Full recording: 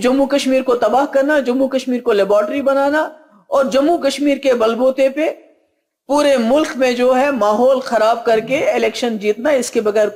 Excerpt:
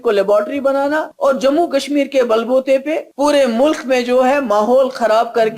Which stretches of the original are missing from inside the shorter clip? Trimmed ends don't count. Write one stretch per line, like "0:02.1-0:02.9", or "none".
0:03.1-0:03.4
0:05.4-0:06.0